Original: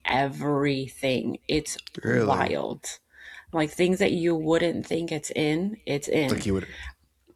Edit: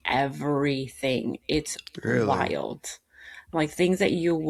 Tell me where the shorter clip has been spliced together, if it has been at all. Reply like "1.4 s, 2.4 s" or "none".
none